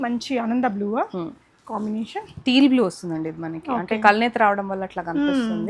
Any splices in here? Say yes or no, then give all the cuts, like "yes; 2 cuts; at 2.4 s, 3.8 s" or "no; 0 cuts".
no; 0 cuts